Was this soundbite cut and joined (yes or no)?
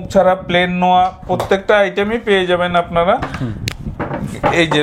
no